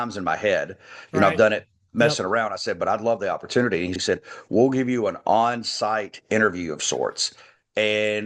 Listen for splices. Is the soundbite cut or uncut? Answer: cut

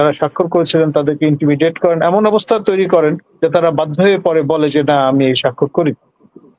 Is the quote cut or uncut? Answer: uncut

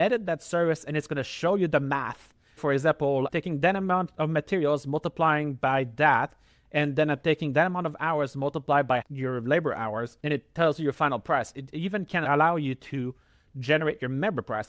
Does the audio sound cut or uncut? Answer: cut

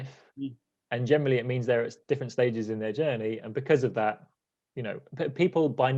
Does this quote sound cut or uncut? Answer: uncut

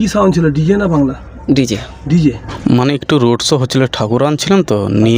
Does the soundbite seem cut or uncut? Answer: cut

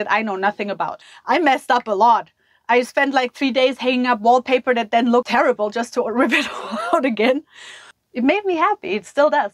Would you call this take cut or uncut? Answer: cut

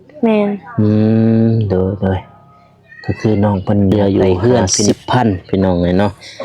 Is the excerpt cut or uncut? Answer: cut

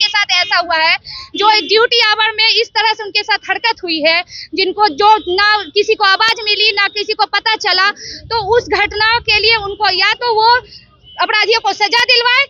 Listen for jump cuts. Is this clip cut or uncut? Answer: uncut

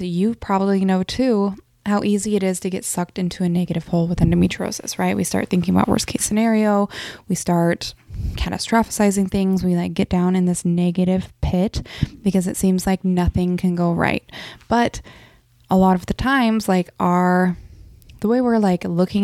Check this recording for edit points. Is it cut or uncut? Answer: uncut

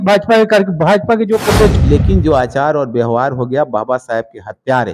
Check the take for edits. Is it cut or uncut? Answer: cut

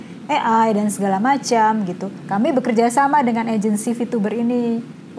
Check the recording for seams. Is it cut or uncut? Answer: cut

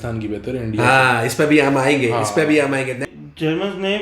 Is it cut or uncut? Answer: cut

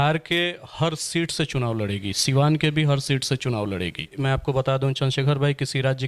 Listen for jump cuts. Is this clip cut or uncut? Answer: cut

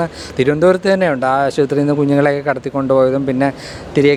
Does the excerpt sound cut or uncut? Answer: uncut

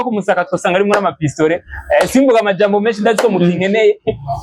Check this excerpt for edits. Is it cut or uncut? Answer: uncut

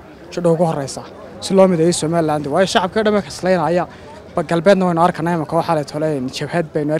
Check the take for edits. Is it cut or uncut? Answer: uncut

